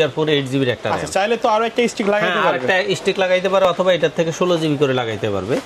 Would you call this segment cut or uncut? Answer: uncut